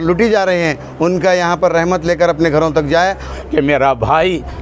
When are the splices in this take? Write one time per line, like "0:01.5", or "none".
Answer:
0:03.3